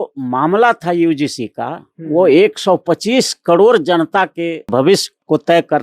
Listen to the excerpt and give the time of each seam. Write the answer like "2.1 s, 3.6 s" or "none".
4.7 s